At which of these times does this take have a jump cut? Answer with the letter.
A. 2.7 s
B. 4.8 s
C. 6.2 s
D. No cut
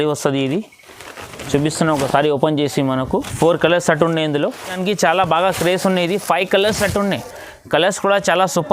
B